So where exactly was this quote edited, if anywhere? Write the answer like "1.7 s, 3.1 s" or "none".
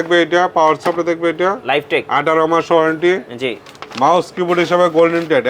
none